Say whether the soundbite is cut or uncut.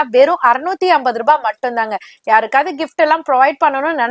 uncut